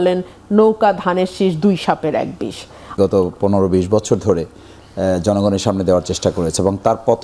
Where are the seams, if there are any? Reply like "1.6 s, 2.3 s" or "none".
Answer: 3.0 s